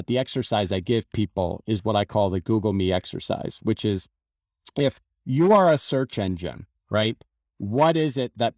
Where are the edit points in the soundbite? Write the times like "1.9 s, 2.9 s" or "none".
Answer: none